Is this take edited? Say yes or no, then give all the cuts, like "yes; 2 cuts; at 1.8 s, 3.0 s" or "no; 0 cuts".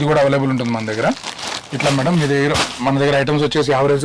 no; 0 cuts